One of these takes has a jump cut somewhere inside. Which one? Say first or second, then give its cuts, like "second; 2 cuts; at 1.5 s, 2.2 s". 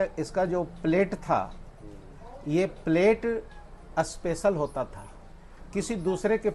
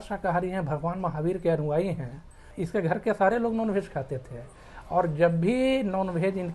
second; 1 cut; at 2.5 s